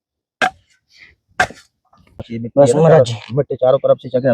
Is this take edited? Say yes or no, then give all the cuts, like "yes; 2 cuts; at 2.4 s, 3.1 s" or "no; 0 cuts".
yes; 1 cut; at 2.3 s